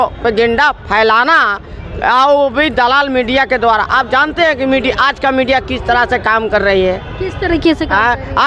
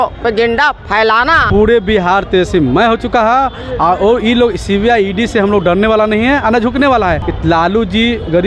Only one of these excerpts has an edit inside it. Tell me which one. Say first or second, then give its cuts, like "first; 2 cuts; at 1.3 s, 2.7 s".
second; 2 cuts; at 1.4 s, 7.3 s